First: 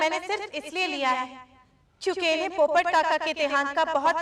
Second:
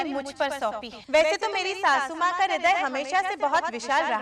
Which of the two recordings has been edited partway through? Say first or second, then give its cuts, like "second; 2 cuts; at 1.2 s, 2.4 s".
second; 1 cut; at 0.9 s